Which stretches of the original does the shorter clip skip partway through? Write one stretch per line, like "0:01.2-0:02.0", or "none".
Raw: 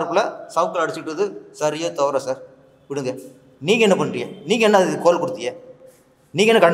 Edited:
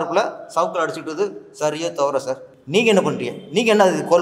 0:02.5-0:03.5